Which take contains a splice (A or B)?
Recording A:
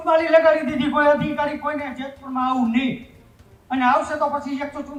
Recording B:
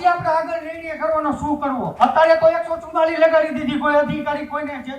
B